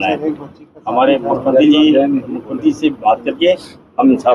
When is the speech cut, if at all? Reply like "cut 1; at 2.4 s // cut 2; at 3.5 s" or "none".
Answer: none